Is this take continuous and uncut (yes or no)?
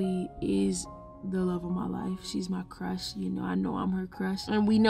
yes